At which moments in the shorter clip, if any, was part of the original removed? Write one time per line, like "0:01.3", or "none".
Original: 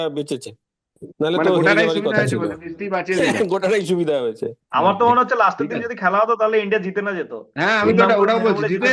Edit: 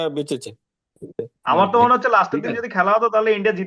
0:01.1